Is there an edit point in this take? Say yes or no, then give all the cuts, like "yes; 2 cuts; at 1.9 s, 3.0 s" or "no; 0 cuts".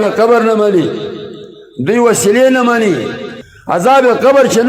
yes; 1 cut; at 3.2 s